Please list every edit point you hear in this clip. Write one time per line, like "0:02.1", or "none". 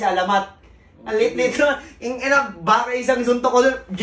none